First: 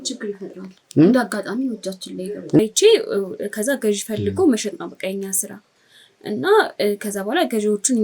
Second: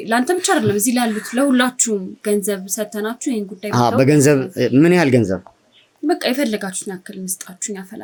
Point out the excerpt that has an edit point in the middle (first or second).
first